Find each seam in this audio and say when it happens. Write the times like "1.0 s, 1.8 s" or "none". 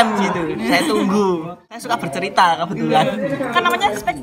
1.8 s